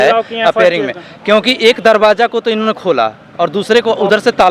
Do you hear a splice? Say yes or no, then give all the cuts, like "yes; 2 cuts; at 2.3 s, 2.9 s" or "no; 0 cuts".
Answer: no; 0 cuts